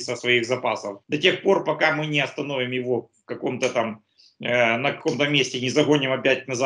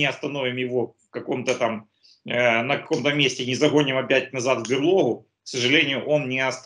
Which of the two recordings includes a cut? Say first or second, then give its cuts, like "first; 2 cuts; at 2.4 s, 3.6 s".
first; 1 cut; at 0.9 s